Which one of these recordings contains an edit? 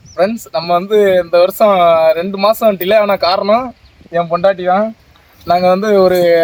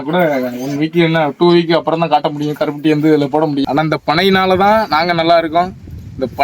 second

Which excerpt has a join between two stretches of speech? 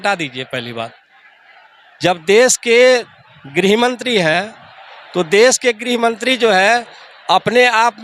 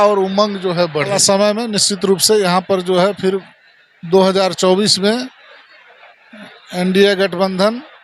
second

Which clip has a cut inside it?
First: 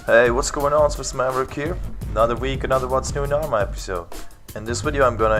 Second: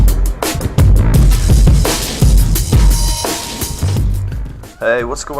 second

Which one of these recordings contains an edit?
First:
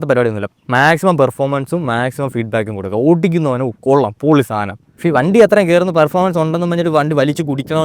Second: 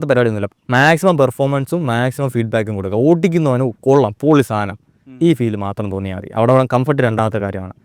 first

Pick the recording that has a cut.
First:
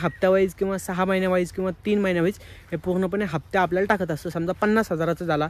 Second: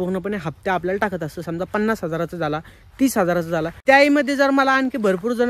second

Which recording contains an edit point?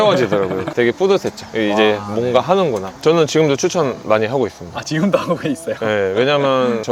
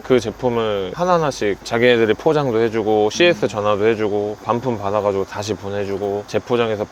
first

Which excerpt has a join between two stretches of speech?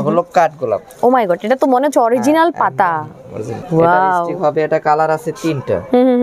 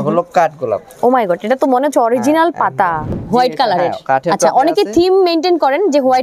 second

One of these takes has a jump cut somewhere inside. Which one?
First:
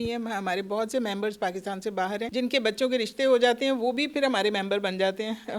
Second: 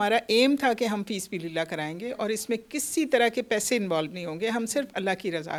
first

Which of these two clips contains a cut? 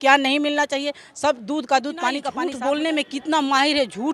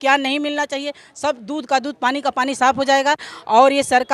first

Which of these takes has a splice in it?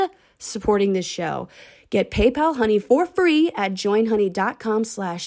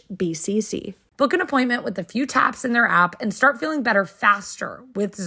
second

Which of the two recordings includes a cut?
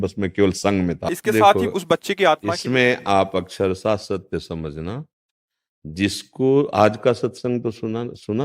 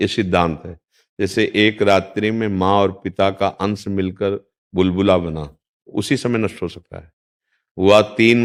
first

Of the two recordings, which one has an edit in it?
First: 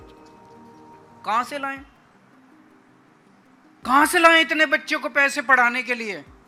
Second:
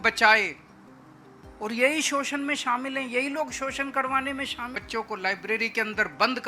second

